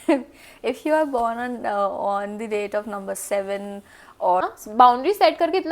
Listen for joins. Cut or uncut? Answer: cut